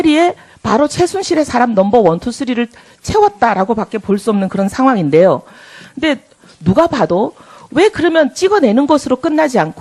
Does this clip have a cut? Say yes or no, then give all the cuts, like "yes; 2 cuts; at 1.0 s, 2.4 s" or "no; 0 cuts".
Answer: no; 0 cuts